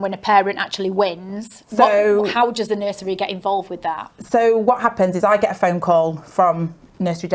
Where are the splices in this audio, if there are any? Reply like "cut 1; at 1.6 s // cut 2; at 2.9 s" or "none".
none

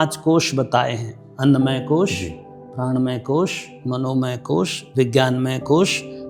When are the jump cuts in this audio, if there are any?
none

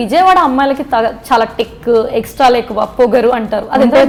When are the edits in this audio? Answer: none

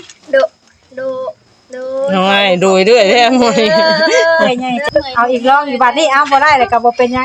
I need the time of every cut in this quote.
cut 1; at 4.8 s

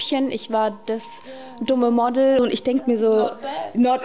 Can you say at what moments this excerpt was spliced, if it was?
cut 1; at 2.4 s

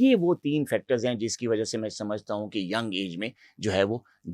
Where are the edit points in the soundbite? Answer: none

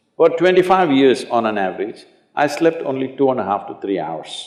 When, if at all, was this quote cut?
none

